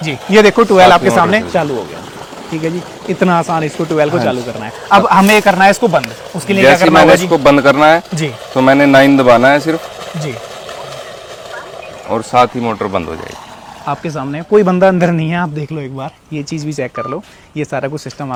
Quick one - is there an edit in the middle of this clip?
no; 0 cuts

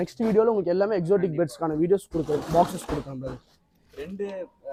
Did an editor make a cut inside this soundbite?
no; 0 cuts

